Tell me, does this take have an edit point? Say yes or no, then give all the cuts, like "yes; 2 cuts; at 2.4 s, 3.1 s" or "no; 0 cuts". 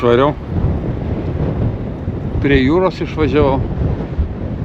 no; 0 cuts